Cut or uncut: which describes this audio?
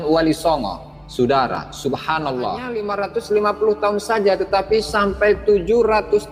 cut